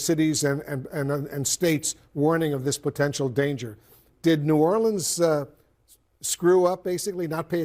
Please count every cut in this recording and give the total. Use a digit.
0